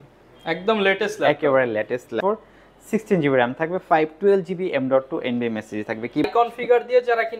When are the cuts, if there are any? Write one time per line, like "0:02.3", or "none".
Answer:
0:02.2
0:06.3